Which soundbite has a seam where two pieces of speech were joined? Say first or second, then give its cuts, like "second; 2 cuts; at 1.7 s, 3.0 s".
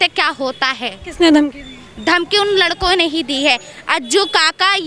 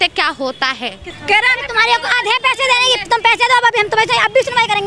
second; 1 cut; at 1.0 s